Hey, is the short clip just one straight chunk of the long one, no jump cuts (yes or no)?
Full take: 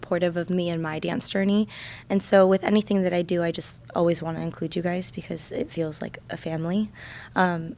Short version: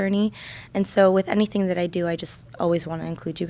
yes